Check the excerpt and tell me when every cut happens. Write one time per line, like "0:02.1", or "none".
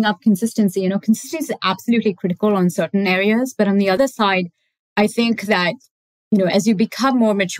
0:04.0